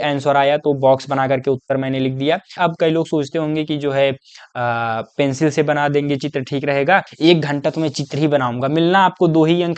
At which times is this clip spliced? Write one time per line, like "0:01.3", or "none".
0:02.5
0:07.1